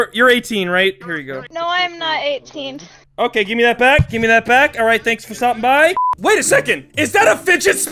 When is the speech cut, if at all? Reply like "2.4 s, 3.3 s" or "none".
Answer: 6.0 s